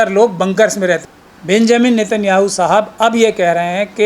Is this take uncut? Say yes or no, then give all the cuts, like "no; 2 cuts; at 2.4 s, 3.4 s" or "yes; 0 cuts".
no; 1 cut; at 1.0 s